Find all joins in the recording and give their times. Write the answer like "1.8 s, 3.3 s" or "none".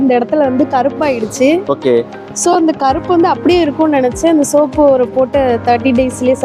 none